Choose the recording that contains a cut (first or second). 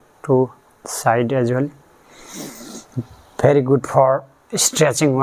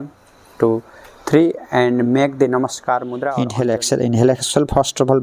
second